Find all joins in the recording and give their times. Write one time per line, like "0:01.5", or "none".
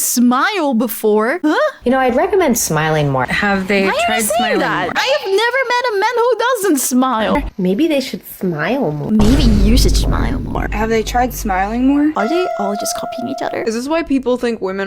0:07.4
0:10.6
0:13.6